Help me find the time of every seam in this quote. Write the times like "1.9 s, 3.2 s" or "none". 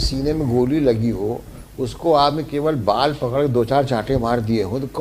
none